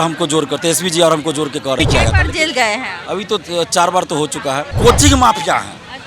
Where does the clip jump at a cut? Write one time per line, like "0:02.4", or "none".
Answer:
0:01.8
0:04.7